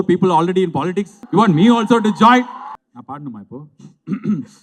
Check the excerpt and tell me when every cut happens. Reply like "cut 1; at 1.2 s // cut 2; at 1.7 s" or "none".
cut 1; at 1.1 s // cut 2; at 2.6 s

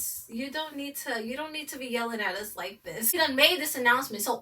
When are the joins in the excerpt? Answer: cut 1; at 3.1 s

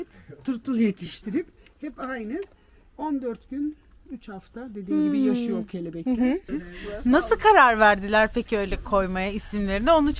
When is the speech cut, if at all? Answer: cut 1; at 6.5 s

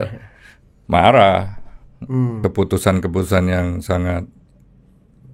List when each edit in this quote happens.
cut 1; at 2.3 s

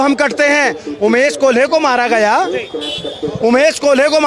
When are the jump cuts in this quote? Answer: none

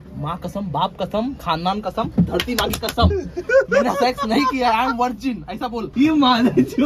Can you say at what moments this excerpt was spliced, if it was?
cut 1; at 5.9 s

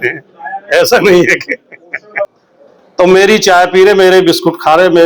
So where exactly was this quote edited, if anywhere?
cut 1; at 2.3 s

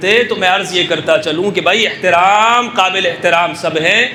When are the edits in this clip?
none

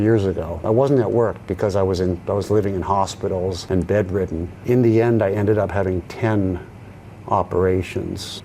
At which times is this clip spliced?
none

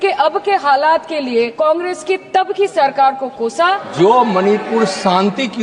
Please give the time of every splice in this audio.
cut 1; at 1.5 s // cut 2; at 3.9 s

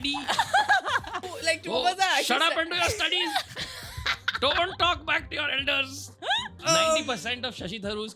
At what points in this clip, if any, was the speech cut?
cut 1; at 1.3 s // cut 2; at 6.6 s

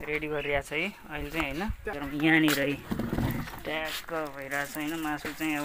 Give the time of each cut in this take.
cut 1; at 1.9 s

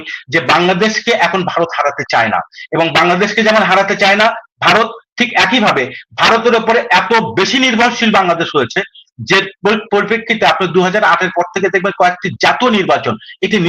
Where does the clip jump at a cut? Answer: none

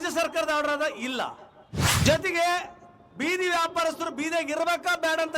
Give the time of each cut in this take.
cut 1; at 2.0 s

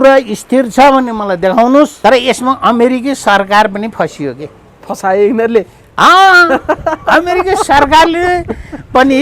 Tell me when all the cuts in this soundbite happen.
cut 1; at 1.9 s

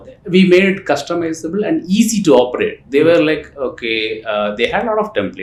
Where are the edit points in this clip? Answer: none

